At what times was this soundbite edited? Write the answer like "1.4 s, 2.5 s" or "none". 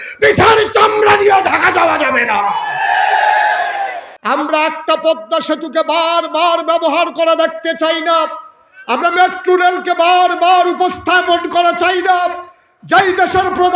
4.1 s